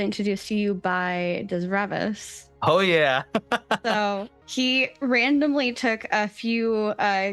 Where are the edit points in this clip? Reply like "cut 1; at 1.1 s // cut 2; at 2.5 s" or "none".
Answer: cut 1; at 4.3 s